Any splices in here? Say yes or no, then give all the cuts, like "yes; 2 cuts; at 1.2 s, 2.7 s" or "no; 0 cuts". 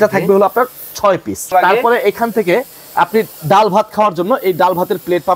yes; 1 cut; at 1.5 s